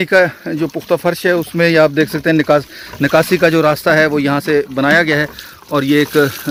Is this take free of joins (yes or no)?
yes